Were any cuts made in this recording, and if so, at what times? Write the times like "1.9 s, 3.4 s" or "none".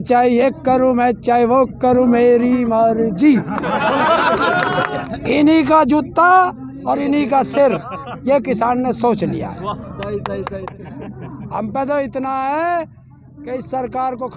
5.0 s, 10.7 s